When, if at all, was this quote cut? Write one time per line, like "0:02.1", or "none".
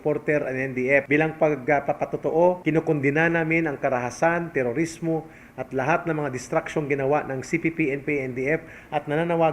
0:01.0
0:02.6